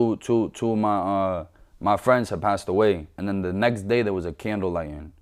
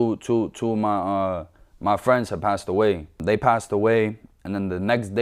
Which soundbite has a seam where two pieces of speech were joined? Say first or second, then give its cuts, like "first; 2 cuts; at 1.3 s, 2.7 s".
first; 1 cut; at 3.1 s